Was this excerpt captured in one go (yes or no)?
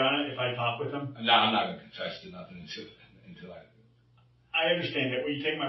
yes